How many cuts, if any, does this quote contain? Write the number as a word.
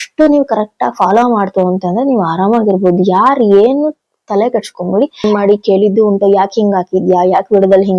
one